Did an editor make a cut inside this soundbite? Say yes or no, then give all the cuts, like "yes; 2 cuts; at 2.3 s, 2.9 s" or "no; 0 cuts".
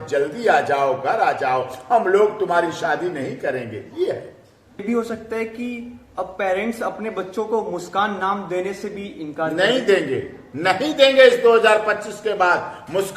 yes; 1 cut; at 4.8 s